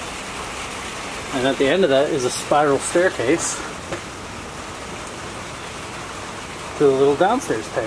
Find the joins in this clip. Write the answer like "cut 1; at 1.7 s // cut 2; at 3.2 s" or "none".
none